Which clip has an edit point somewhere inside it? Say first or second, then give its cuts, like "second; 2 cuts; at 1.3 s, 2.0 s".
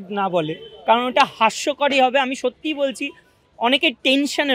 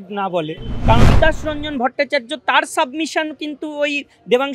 second; 1 cut; at 1.0 s